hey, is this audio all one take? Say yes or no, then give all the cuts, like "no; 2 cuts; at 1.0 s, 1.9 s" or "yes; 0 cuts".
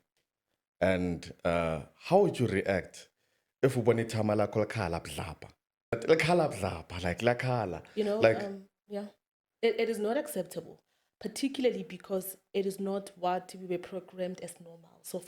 no; 1 cut; at 6.0 s